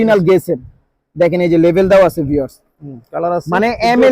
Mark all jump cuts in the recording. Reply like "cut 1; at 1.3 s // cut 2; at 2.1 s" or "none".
cut 1; at 2.7 s